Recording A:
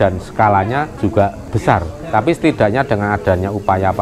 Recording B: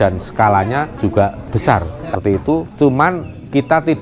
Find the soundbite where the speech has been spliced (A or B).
B